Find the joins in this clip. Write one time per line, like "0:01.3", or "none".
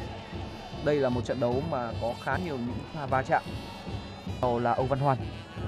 0:04.4